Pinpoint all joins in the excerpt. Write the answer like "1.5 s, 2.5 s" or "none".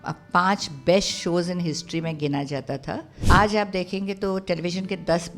3.2 s